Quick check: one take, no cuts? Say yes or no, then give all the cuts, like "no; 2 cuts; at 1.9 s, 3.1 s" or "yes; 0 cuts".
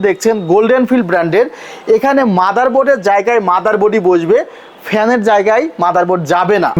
yes; 0 cuts